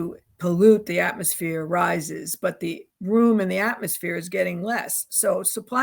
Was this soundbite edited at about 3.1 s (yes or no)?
no